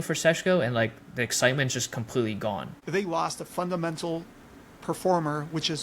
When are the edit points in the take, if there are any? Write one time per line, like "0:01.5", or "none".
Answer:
0:02.7